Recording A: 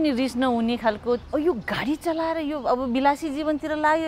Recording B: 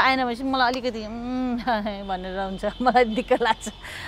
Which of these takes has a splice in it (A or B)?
A